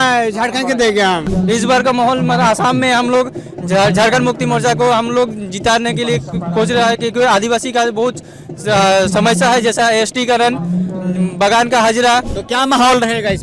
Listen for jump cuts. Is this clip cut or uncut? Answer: cut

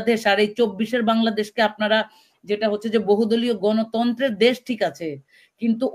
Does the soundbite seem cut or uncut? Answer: uncut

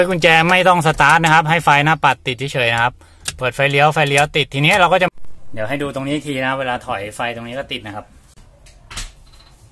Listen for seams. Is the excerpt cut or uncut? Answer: cut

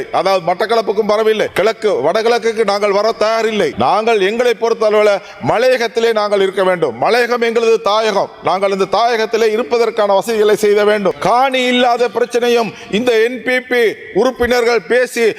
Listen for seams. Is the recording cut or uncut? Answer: cut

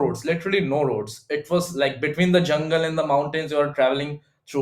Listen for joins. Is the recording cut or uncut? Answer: uncut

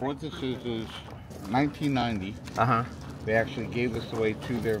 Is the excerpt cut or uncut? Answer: uncut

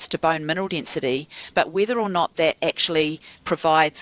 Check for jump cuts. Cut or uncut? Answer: uncut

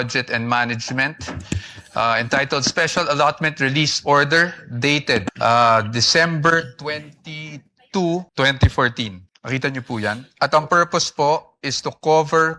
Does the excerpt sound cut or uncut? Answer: cut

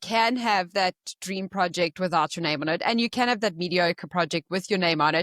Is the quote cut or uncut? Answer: uncut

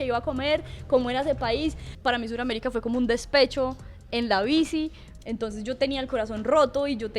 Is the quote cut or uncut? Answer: cut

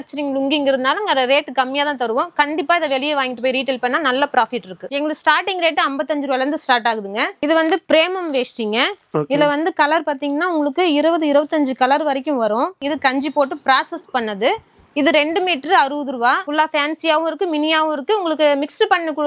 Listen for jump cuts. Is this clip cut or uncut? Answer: cut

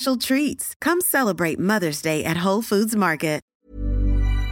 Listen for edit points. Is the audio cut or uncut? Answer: cut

